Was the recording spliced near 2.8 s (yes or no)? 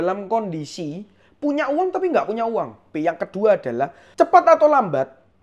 yes